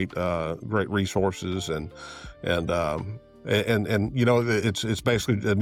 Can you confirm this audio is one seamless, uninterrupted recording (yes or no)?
yes